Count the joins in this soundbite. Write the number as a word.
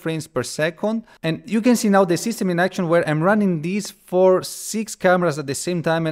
one